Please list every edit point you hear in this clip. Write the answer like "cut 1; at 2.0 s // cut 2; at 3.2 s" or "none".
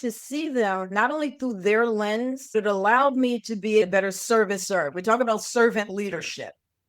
cut 1; at 2.5 s // cut 2; at 3.8 s